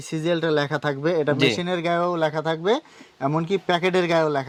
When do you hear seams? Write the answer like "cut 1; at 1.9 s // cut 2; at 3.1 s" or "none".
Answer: none

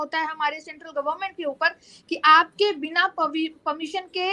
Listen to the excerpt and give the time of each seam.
none

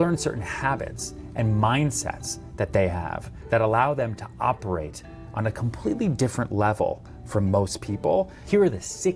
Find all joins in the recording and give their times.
none

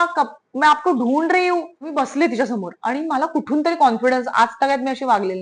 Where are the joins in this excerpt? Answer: cut 1; at 1.8 s

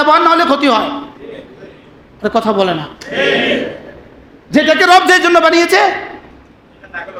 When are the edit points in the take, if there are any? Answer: none

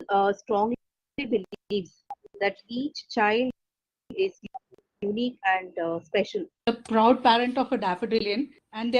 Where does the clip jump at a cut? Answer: cut 1; at 6.5 s

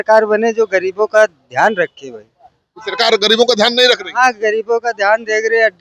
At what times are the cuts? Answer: none

